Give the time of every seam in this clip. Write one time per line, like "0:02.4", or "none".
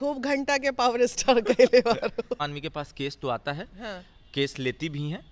0:02.4